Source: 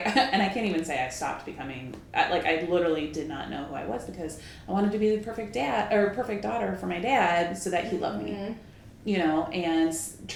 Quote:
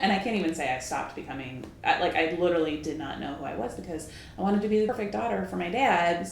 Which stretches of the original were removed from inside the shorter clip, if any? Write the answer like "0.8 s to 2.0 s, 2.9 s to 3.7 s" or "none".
5.2 s to 6.2 s